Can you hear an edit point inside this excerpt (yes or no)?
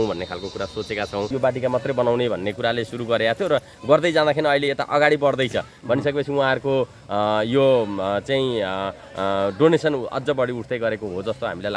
yes